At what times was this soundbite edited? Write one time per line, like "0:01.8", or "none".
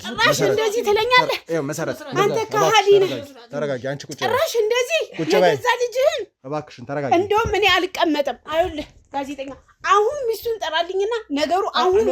none